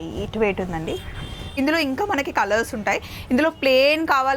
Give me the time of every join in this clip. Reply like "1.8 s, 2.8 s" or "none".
1.5 s